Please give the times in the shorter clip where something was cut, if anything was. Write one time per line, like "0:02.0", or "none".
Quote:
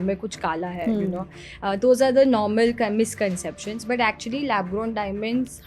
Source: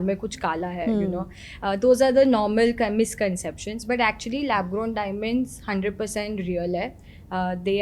none